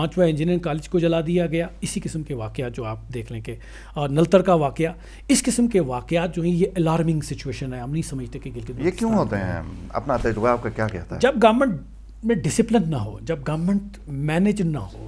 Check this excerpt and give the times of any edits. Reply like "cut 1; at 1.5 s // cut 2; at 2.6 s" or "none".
none